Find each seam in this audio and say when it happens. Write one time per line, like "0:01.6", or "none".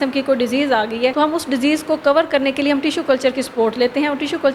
0:01.1